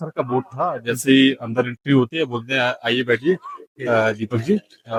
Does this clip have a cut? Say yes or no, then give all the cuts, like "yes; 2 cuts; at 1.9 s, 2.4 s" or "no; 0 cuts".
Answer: no; 0 cuts